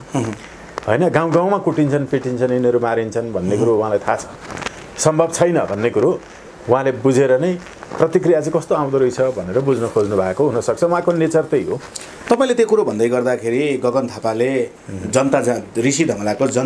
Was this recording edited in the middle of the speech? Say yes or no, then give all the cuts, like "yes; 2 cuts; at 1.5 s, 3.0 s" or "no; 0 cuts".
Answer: no; 0 cuts